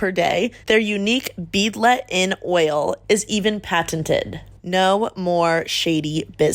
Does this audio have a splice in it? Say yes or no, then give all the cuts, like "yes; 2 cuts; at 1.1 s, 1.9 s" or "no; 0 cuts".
yes; 1 cut; at 4.4 s